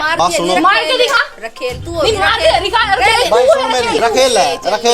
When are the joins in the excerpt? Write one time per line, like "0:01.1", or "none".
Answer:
0:04.0